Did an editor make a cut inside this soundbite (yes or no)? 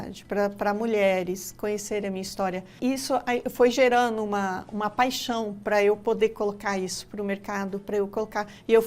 yes